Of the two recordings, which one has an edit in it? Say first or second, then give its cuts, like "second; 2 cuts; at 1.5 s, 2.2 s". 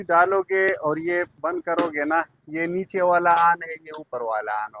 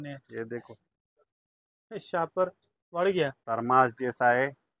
second; 1 cut; at 3.4 s